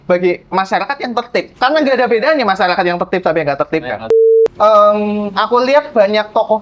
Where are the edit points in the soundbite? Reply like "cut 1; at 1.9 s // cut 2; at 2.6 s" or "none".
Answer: cut 1; at 1.5 s // cut 2; at 4.1 s